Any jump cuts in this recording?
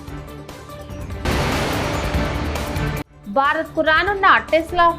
yes; 2 cuts; at 1.2 s, 3.1 s

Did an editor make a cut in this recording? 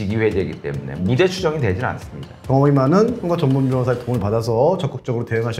yes; 1 cut; at 2.3 s

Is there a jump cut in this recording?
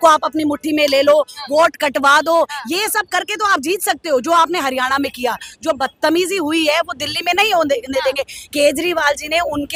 no; 0 cuts

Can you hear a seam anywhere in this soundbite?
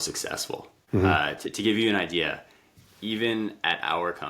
yes; 1 cut; at 1.1 s

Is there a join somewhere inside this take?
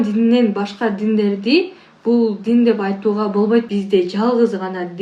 yes; 1 cut; at 3.7 s

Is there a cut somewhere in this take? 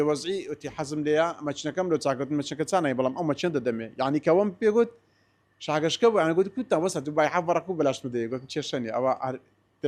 no; 0 cuts

